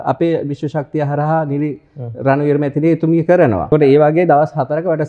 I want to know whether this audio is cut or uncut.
cut